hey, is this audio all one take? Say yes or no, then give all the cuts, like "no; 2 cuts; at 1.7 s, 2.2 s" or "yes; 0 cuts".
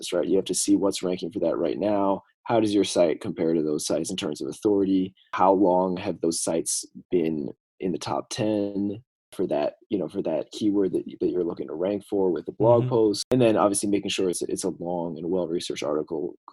no; 3 cuts; at 5.3 s, 9.3 s, 13.2 s